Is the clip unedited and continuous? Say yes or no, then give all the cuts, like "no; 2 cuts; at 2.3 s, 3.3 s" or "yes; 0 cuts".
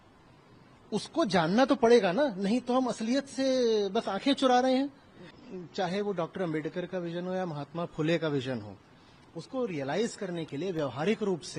no; 1 cut; at 5.4 s